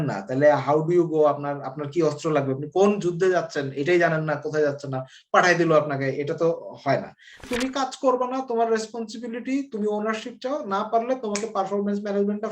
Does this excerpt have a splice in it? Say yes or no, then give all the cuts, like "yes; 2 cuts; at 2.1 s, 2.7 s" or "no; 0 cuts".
yes; 1 cut; at 7.4 s